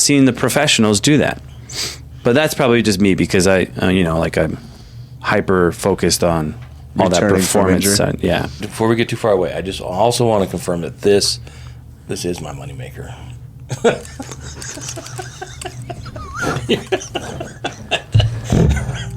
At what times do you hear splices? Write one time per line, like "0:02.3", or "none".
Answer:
0:08.7